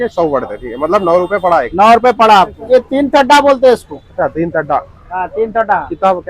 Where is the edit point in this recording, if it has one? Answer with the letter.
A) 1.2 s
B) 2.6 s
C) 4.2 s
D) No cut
B